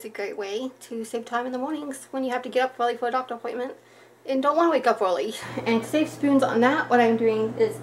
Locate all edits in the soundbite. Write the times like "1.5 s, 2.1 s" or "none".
5.4 s